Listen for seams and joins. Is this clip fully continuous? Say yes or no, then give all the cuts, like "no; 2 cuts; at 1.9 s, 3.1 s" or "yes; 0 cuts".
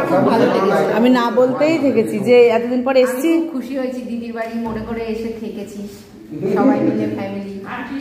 yes; 0 cuts